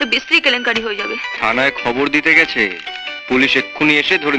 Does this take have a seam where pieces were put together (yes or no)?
yes